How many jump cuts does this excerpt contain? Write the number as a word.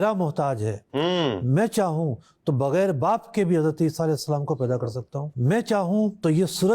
one